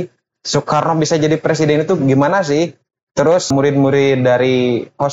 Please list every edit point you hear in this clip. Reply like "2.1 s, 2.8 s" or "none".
3.5 s